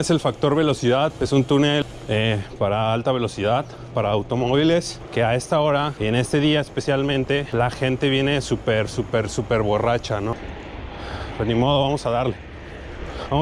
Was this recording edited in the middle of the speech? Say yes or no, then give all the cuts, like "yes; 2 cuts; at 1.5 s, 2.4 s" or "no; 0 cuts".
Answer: yes; 6 cuts; at 1.1 s, 1.8 s, 5.0 s, 5.9 s, 7.5 s, 10.5 s